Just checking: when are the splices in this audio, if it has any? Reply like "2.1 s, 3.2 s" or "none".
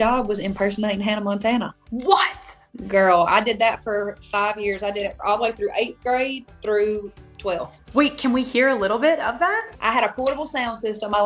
none